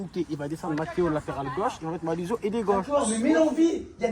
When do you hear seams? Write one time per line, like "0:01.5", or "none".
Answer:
0:02.9